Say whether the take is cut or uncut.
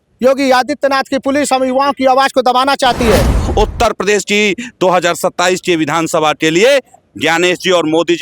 cut